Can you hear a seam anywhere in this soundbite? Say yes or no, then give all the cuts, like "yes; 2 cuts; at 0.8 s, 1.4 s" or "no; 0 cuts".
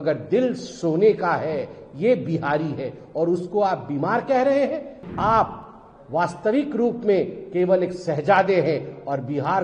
yes; 1 cut; at 5.0 s